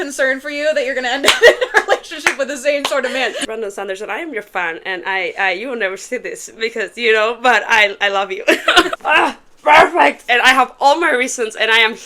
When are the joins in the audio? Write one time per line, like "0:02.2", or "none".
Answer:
0:03.4
0:09.0